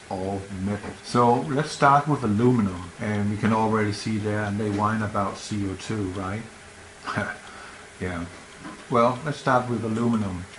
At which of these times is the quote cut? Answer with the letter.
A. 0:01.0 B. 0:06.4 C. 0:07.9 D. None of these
A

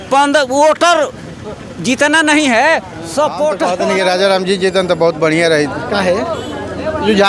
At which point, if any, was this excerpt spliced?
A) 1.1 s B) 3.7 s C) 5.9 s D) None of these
B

